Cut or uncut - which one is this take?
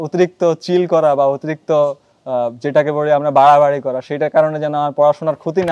uncut